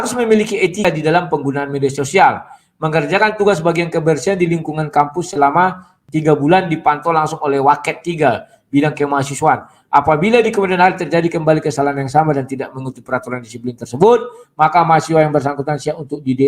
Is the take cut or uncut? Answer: cut